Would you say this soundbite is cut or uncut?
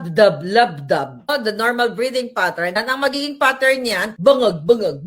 cut